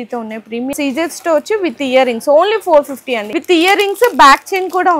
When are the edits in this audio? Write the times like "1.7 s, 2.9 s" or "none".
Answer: 0.7 s, 3.2 s